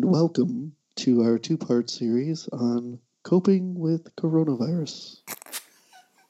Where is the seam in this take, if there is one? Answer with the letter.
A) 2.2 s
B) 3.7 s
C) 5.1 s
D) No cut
C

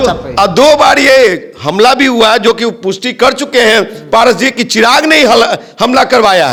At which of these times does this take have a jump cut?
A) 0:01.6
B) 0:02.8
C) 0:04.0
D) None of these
D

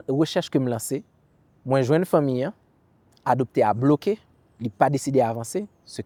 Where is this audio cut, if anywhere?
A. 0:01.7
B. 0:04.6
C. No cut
C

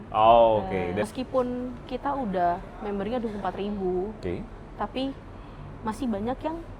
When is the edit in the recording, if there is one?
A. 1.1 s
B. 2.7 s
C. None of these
A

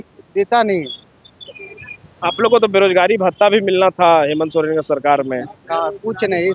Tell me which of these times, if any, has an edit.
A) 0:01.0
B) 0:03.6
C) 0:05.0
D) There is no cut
D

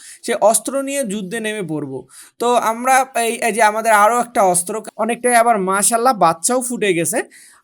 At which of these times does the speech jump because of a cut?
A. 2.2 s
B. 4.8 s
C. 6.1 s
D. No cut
B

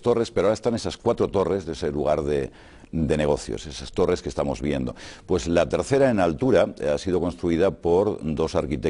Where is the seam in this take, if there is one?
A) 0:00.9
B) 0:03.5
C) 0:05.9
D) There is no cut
B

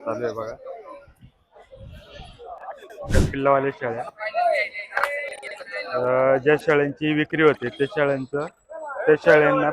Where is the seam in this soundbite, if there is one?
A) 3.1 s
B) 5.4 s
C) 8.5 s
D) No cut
A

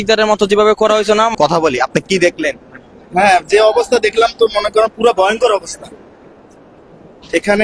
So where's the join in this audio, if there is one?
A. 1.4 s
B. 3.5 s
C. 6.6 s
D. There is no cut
A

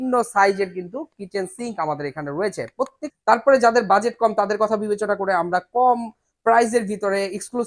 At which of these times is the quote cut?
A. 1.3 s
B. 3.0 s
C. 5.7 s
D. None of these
B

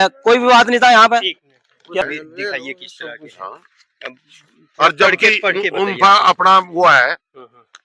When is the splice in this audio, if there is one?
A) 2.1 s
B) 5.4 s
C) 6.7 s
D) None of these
A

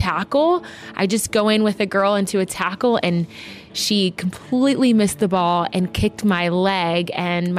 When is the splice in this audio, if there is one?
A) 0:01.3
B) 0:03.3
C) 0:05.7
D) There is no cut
D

